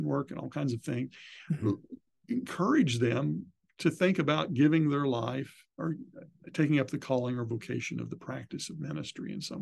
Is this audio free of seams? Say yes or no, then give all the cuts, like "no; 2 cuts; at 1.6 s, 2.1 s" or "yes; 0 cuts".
yes; 0 cuts